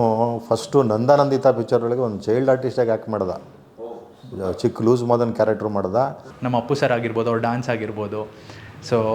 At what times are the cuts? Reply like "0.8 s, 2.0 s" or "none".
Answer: 6.3 s